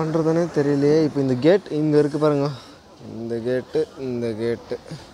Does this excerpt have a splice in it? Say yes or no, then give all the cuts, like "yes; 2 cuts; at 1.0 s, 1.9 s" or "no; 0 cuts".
no; 0 cuts